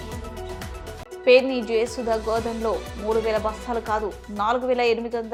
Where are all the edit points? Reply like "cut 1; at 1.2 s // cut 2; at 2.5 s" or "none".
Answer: none